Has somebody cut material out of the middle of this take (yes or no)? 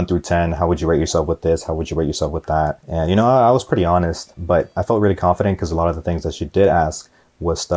yes